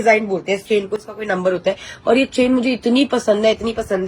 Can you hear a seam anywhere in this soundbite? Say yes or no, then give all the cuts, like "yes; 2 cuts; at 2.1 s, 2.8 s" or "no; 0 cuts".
no; 0 cuts